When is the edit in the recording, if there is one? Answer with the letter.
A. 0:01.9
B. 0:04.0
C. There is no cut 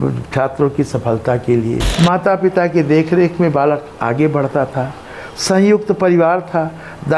A